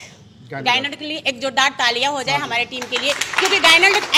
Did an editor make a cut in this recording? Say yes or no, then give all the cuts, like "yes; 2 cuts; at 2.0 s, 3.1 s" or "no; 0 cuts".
no; 0 cuts